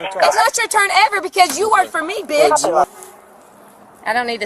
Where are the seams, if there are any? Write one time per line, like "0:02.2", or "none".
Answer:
0:02.9